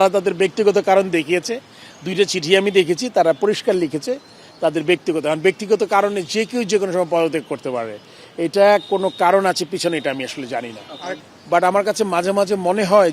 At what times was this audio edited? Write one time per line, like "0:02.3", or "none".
0:11.1